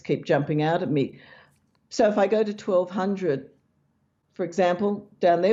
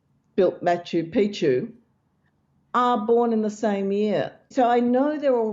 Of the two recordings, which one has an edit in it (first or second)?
second